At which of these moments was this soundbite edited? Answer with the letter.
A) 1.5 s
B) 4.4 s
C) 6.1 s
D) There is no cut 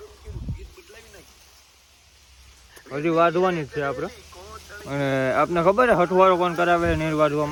D